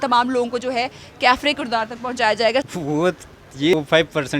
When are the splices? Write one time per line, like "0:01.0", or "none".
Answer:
0:02.7
0:03.7